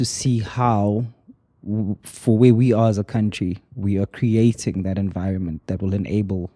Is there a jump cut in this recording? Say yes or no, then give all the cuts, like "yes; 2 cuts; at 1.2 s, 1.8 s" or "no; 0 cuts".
no; 0 cuts